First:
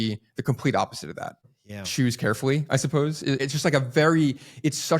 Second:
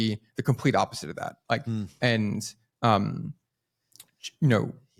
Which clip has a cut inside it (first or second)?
first